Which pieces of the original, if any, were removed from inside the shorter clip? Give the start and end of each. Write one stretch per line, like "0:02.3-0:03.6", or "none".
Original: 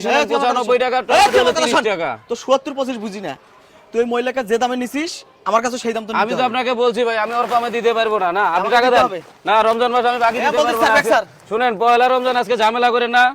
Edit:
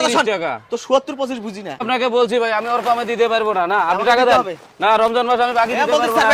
0:03.4-0:06.5